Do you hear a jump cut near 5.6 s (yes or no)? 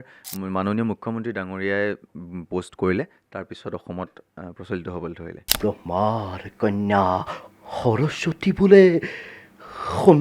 yes